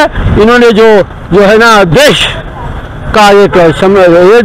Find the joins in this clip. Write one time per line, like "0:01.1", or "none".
none